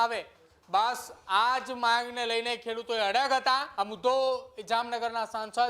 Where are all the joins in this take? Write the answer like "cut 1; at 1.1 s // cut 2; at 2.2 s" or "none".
cut 1; at 3.7 s